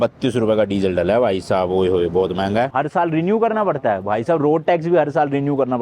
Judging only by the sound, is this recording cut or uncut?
cut